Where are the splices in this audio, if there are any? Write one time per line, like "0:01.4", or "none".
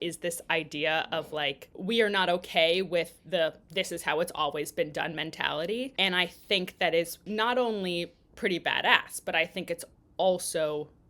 0:01.7
0:05.9
0:07.2